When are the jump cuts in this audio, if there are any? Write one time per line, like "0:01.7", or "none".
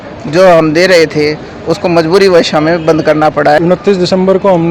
0:03.6